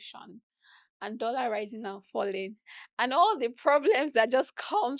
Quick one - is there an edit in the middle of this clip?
no; 0 cuts

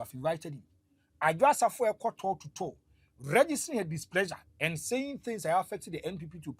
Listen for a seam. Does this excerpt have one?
no; 0 cuts

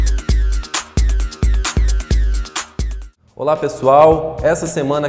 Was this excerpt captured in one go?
no; 1 cut; at 3.0 s

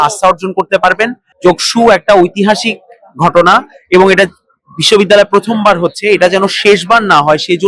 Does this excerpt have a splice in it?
yes; 1 cut; at 1.2 s

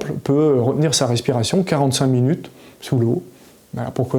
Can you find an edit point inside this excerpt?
no; 0 cuts

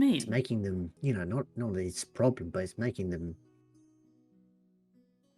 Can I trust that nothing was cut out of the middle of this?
no; 1 cut; at 0.9 s

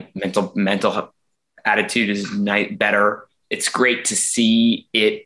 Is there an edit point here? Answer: yes; 1 cut; at 3.4 s

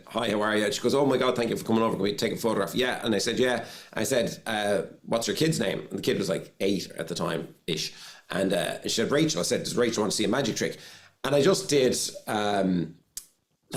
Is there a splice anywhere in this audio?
no; 0 cuts

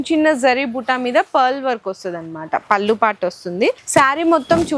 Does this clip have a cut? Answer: yes; 1 cut; at 3.8 s

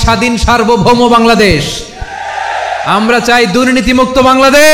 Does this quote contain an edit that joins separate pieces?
no; 0 cuts

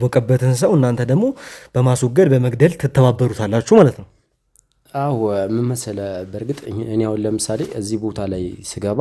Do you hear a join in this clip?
no; 0 cuts

